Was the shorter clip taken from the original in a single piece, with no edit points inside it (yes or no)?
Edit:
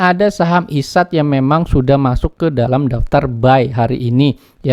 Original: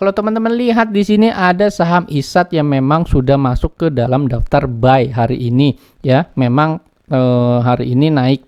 yes